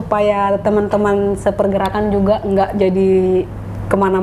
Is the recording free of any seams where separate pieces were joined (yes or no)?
yes